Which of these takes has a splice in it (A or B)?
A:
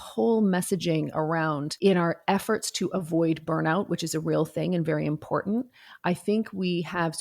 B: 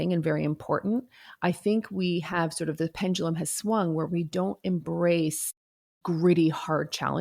A